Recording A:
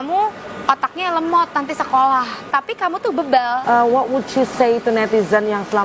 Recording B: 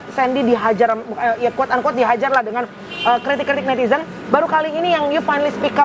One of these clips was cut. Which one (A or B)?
A